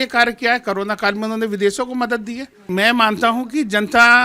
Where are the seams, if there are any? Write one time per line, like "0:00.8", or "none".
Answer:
0:02.7